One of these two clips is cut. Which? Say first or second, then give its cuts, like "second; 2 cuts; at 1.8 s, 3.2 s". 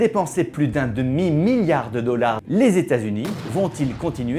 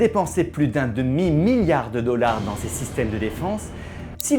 first; 1 cut; at 2.4 s